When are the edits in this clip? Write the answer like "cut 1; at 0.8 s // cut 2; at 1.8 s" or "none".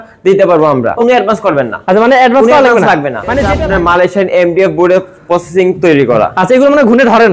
cut 1; at 0.9 s // cut 2; at 3.5 s

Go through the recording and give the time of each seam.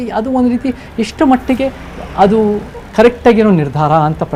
none

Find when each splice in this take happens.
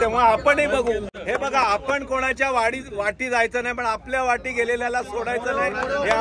cut 1; at 1.1 s

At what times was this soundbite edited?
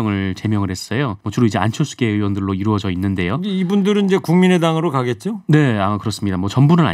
cut 1; at 1.2 s

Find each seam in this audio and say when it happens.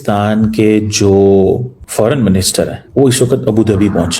cut 1; at 1.8 s // cut 2; at 2.8 s

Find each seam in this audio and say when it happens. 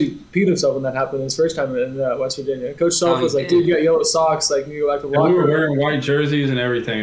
none

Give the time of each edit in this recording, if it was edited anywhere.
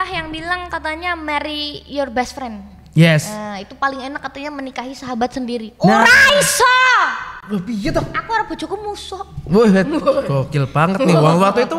none

